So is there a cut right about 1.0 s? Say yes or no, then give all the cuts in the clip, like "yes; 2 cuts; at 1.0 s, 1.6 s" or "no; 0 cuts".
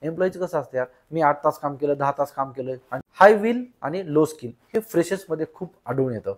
no; 1 cut; at 3.0 s